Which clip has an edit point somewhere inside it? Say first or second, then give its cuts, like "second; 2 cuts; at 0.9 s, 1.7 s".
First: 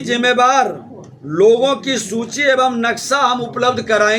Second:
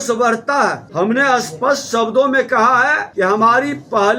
second; 2 cuts; at 0.8 s, 3.0 s